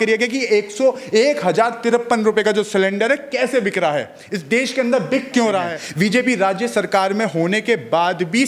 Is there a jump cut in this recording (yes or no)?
yes